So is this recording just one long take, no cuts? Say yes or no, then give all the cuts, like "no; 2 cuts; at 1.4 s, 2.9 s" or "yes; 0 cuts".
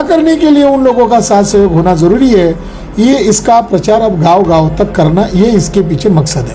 yes; 0 cuts